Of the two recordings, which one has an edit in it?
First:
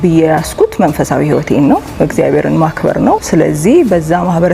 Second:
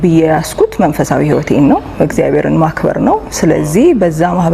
first; 1 cut; at 3.2 s

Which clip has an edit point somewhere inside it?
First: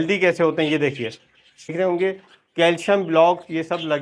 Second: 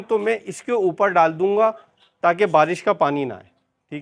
first; 1 cut; at 1.7 s

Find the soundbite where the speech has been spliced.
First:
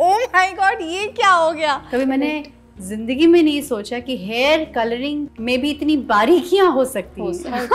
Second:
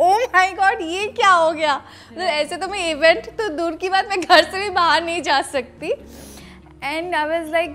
first; 2 cuts; at 1.8 s, 5.3 s

